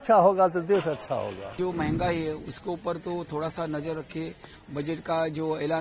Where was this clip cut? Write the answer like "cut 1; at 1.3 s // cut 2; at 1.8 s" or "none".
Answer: cut 1; at 1.5 s